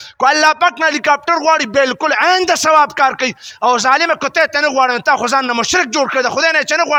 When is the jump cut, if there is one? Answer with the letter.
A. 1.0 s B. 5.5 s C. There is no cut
C